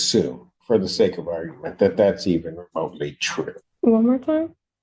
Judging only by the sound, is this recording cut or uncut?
cut